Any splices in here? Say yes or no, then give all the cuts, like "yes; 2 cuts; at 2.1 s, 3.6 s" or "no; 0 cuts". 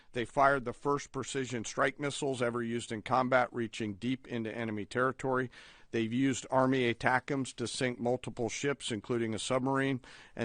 no; 0 cuts